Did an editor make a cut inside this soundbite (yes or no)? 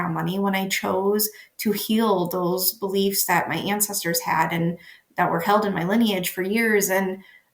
no